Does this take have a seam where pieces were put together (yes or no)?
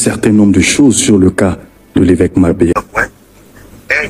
yes